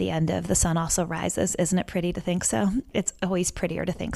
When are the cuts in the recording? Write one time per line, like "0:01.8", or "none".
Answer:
0:02.9

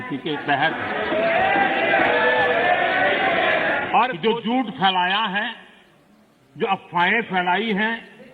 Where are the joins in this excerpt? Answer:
0:04.2

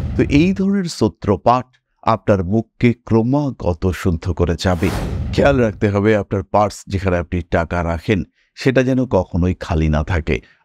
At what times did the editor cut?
0:05.1

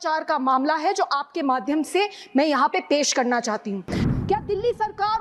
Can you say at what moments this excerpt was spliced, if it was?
0:04.1

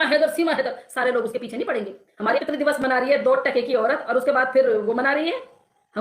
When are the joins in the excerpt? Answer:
0:02.4

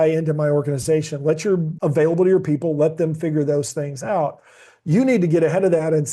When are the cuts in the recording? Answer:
0:01.7

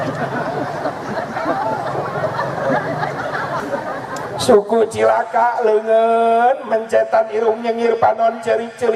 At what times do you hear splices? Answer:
0:03.6

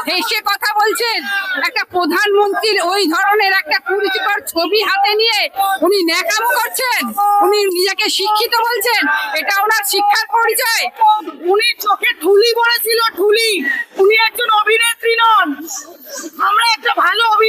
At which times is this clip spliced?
0:11.1

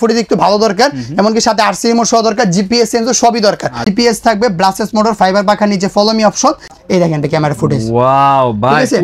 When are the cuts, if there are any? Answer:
0:03.8
0:06.7

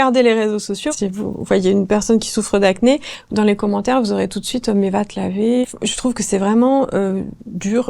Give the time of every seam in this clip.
0:00.9
0:05.6

